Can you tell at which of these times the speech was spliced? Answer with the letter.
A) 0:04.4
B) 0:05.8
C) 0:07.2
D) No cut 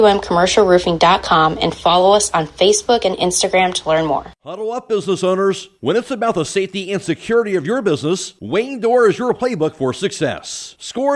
A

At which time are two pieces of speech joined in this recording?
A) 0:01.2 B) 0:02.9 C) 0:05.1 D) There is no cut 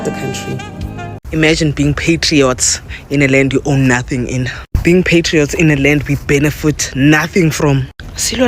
A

